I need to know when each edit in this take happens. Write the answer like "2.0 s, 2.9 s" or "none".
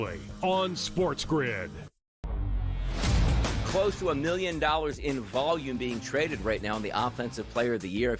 2.3 s